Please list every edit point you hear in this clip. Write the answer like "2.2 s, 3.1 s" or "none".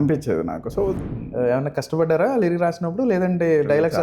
1.0 s